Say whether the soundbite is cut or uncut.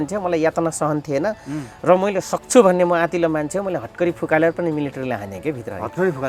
uncut